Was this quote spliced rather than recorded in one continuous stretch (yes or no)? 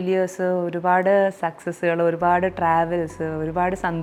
no